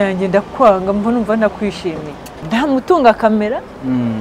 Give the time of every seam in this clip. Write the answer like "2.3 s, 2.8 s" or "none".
2.4 s